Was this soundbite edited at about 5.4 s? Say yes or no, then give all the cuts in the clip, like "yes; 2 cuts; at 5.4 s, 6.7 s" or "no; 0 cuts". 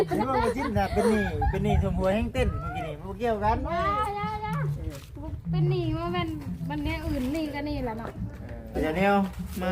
no; 1 cut; at 8.8 s